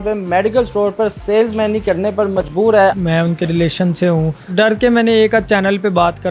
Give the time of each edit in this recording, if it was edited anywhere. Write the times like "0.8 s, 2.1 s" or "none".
2.9 s, 4.5 s